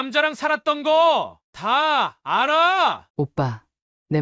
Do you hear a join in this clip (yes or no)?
yes